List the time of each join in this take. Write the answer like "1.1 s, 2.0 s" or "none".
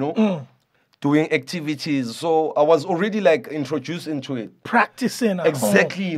none